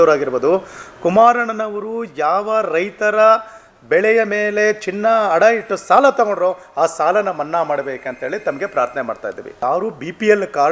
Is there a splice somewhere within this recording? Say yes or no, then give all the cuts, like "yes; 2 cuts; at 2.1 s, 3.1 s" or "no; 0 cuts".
yes; 1 cut; at 9.5 s